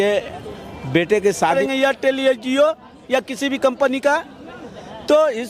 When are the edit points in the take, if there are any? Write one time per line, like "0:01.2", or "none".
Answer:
0:01.6

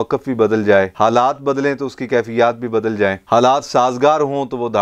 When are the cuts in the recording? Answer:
0:00.9

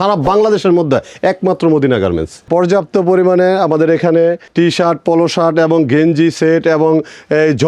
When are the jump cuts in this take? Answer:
0:02.5
0:04.4

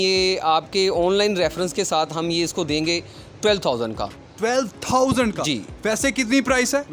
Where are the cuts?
none

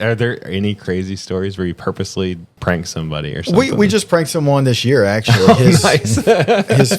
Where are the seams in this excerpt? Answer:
0:02.6

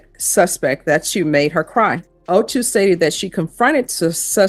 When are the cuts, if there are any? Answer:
0:02.1

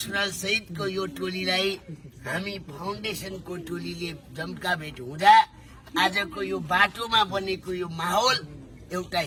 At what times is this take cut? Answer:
none

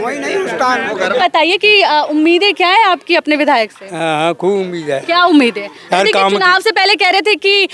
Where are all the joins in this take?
0:01.2

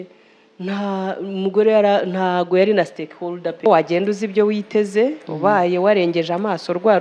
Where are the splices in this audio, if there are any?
0:03.6

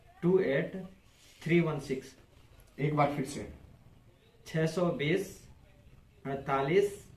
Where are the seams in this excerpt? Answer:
none

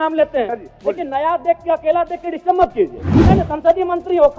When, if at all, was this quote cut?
0:03.2

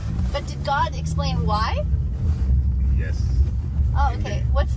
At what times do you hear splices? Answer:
none

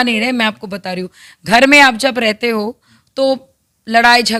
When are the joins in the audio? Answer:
none

